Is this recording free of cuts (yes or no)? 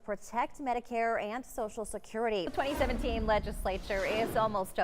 no